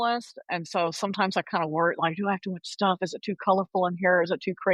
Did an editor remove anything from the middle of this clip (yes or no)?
no